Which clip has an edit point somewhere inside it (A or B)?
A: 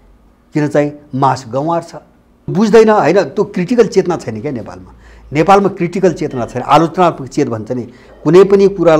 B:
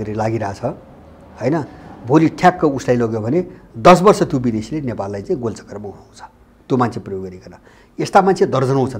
A